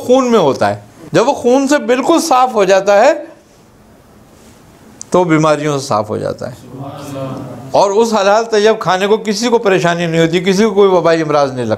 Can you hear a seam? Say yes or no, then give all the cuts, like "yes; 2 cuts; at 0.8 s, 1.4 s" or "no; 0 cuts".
yes; 1 cut; at 0.9 s